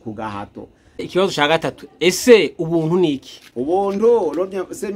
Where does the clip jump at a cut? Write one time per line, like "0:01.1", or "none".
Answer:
0:01.0